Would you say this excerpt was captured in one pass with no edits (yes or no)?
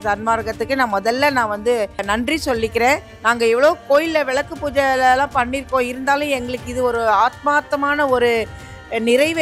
no